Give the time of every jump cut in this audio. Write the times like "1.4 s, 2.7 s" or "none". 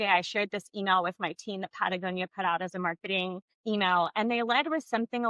3.5 s